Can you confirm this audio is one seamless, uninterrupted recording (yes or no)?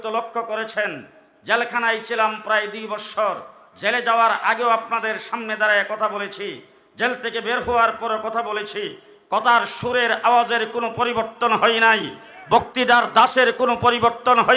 yes